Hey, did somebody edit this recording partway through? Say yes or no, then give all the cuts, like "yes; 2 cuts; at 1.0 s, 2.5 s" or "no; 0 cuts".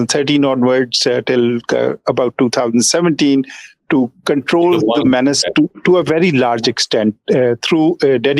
no; 0 cuts